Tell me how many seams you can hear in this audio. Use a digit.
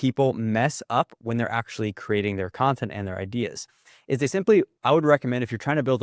1